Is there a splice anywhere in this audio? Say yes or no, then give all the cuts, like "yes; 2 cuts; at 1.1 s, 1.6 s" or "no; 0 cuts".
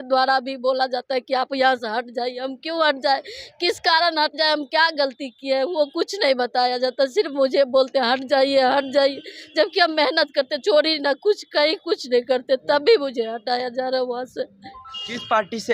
no; 0 cuts